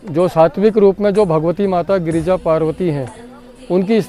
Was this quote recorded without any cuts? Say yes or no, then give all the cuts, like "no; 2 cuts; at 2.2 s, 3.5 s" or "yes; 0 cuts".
yes; 0 cuts